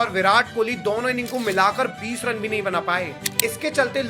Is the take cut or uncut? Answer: cut